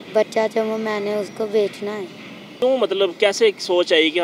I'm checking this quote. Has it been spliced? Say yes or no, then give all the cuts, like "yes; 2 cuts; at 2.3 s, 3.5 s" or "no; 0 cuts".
yes; 1 cut; at 2.6 s